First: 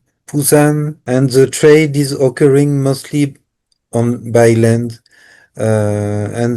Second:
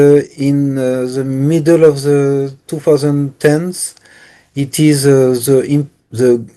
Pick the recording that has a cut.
first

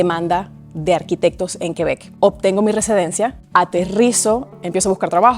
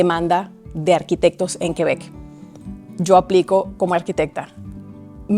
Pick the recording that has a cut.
first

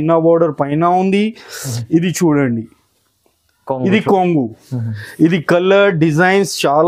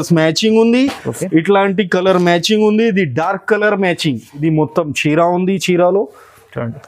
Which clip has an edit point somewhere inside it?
second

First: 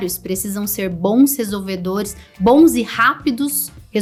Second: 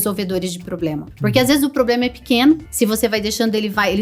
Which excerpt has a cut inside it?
second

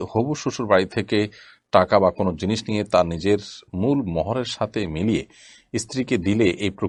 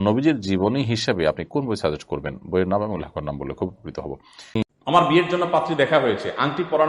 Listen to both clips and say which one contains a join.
second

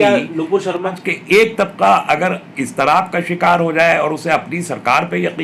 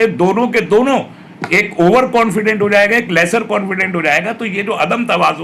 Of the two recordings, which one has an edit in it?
first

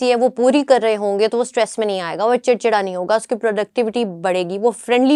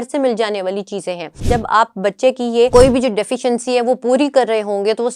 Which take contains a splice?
second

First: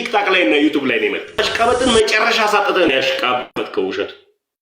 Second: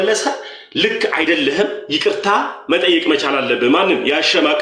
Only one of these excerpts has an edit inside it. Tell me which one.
first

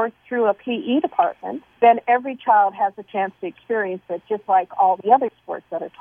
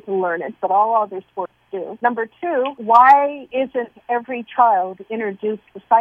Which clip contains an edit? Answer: second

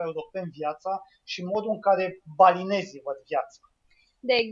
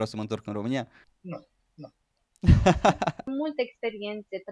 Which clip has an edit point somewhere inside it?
second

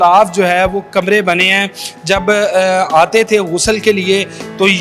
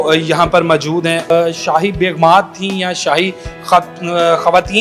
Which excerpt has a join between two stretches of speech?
second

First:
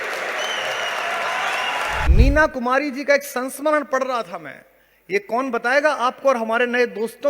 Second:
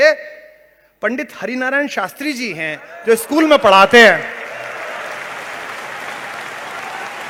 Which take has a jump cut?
first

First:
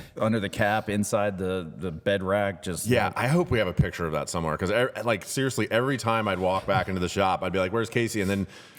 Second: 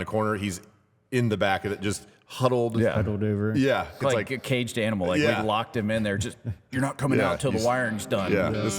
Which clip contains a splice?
second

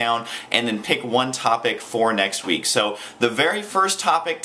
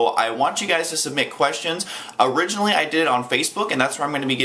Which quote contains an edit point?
first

